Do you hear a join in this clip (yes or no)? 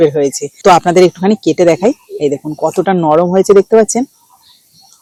no